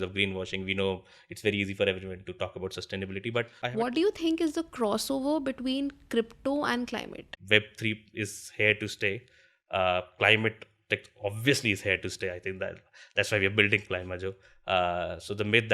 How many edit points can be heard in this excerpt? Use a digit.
2